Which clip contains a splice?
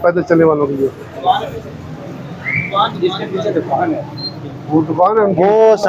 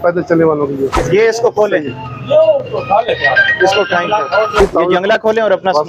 second; 2 cuts; at 1.0 s, 4.6 s

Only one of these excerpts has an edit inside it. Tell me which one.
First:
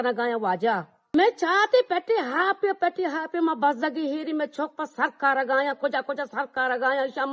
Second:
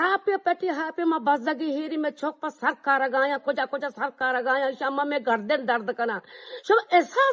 first; 1 cut; at 0.9 s

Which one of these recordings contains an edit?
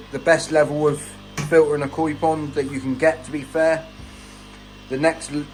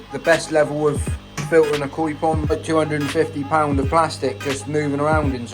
second; 1 cut; at 2.5 s

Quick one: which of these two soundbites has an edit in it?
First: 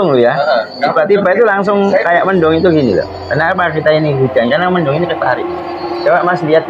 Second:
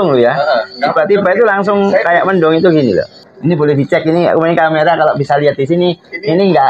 second; 1 cut; at 3.2 s

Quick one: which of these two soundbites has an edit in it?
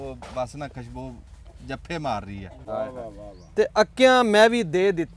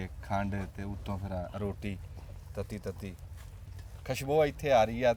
first; 1 cut; at 2.6 s

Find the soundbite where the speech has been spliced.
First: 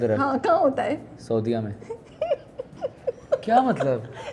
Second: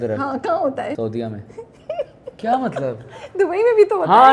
second; 2 cuts; at 1.0 s, 2.4 s

